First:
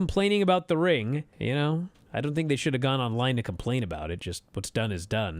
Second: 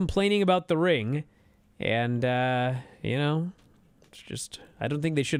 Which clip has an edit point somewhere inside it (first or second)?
first